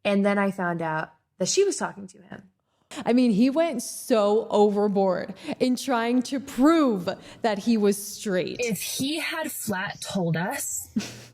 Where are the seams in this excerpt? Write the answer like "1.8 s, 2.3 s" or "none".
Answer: 2.9 s, 8.5 s